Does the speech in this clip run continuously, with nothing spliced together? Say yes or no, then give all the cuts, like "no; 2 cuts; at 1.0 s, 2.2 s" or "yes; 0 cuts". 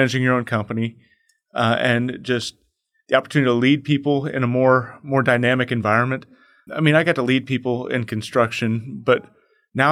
no; 1 cut; at 6.6 s